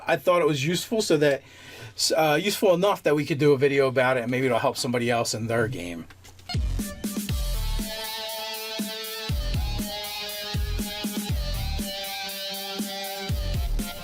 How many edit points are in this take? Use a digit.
1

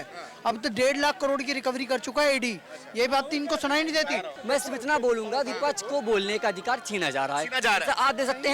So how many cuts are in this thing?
1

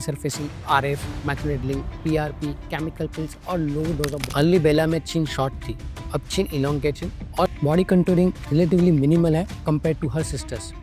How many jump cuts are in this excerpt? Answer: 2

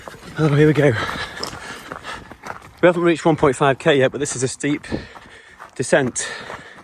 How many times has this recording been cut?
1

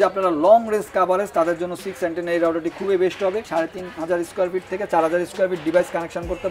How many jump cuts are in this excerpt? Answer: 1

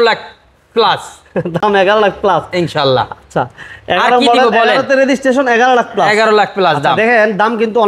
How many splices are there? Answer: 0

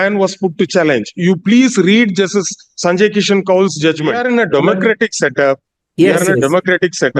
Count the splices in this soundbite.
1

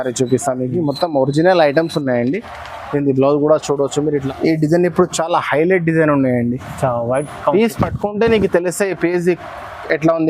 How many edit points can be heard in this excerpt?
1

